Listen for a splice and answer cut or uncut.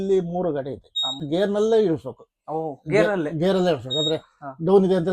cut